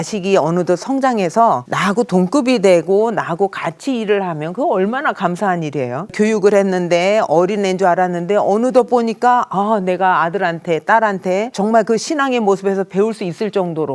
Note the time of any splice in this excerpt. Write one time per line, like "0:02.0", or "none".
0:01.7
0:06.1
0:11.5